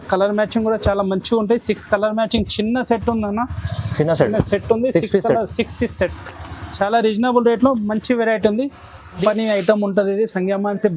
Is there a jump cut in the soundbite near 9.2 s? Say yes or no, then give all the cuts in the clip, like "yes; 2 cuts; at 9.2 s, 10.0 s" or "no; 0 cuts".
yes; 1 cut; at 9.2 s